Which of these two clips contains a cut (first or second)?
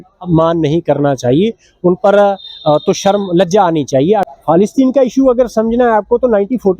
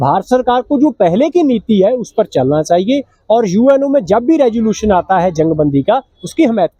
first